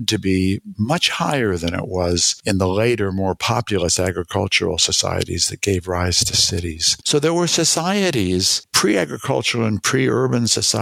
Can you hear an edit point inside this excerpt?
yes; 2 cuts; at 6.9 s, 8.6 s

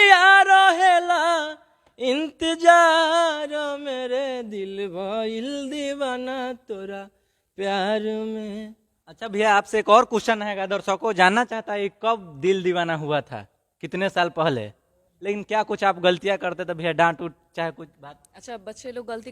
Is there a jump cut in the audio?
yes; 1 cut; at 15.1 s

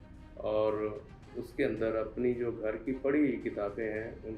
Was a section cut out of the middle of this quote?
no; 0 cuts

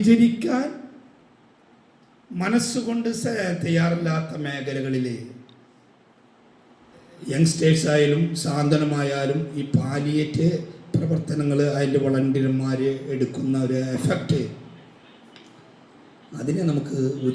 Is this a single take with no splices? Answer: yes; 0 cuts

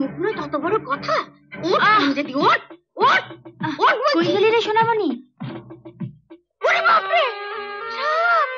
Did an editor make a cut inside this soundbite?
no; 0 cuts

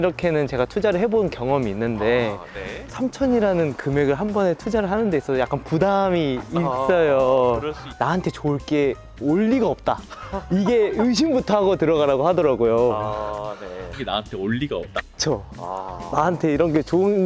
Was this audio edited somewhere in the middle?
no; 0 cuts

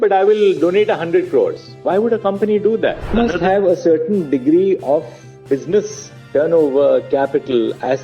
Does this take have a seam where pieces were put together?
yes; 1 cut; at 3.1 s

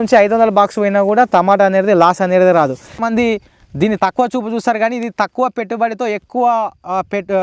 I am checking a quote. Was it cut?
yes; 1 cut; at 3.0 s

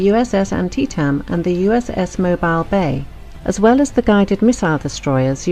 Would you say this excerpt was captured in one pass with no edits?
yes; 0 cuts

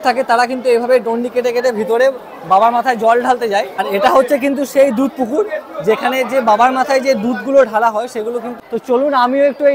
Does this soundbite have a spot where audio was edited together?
yes; 2 cuts; at 3.9 s, 8.5 s

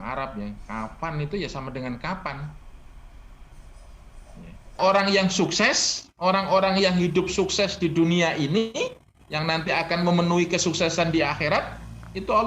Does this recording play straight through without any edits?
no; 1 cut; at 4.8 s

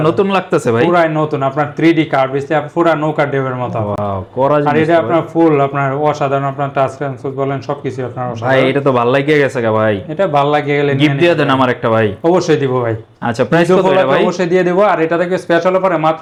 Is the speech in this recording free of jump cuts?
yes; 0 cuts

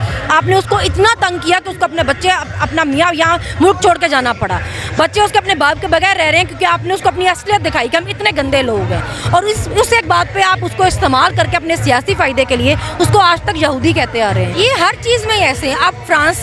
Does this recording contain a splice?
yes; 1 cut; at 14.5 s

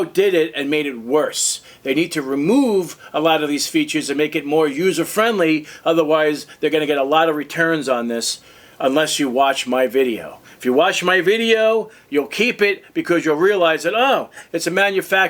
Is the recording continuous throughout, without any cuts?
yes; 0 cuts

